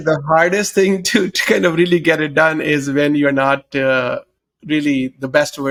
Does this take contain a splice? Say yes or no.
no